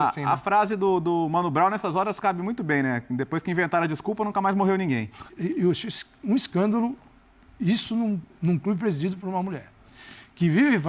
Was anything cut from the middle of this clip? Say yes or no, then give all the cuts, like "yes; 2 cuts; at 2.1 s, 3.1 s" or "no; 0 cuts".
yes; 1 cut; at 5.2 s